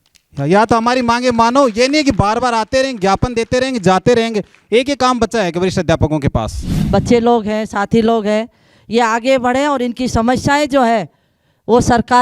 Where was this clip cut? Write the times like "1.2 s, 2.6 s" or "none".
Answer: 6.8 s